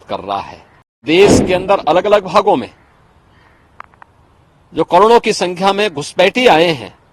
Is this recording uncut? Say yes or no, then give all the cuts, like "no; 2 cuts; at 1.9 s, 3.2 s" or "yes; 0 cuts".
no; 1 cut; at 1.0 s